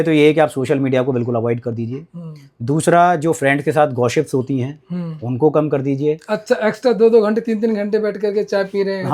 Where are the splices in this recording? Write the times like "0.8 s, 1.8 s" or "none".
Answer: none